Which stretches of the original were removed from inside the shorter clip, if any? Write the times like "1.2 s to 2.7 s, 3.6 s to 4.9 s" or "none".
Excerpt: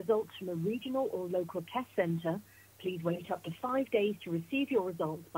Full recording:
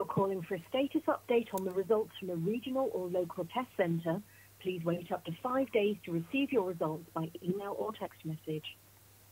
none